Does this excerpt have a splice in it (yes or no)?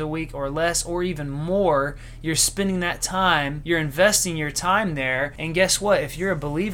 yes